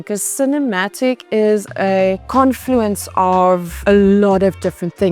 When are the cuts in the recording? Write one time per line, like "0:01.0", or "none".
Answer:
0:02.2
0:03.7